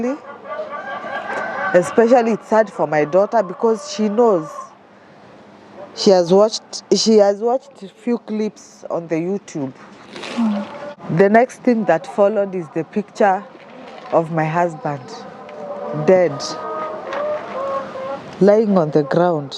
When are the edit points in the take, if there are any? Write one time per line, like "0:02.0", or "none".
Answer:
0:10.9